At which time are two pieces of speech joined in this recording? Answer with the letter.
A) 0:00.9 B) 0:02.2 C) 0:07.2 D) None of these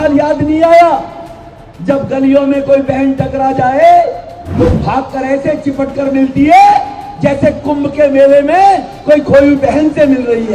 D